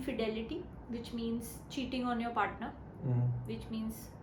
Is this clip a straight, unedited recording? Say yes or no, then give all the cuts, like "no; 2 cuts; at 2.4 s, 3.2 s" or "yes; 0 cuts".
yes; 0 cuts